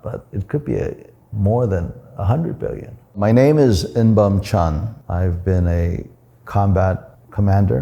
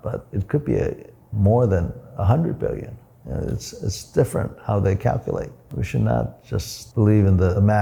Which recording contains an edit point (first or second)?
first